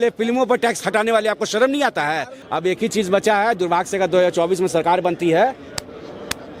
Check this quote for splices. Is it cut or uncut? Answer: cut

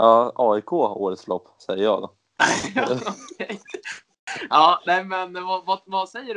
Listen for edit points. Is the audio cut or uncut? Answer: uncut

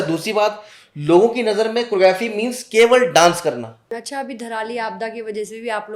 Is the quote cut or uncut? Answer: cut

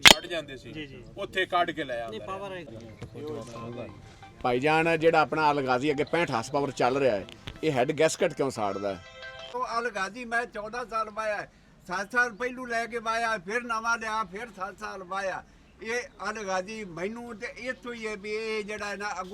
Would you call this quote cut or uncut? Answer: cut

